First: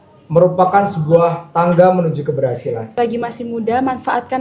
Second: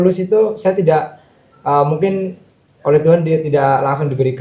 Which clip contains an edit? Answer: first; 1 cut; at 2.9 s

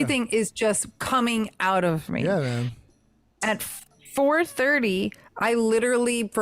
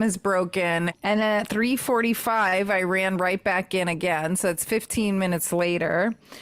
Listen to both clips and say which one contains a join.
second; 1 cut; at 0.9 s

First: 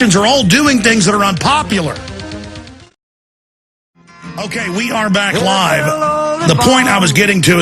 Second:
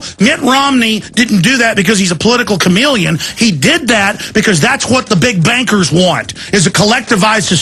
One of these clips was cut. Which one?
first; 1 cut; at 4.9 s

